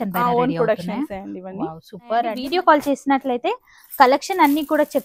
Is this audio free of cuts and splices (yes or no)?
no